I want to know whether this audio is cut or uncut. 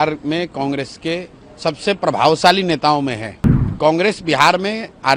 cut